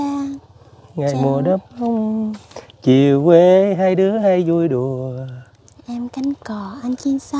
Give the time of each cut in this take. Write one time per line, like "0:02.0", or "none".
none